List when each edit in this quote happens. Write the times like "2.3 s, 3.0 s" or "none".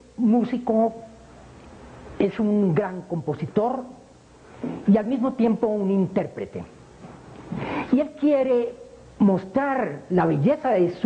3.2 s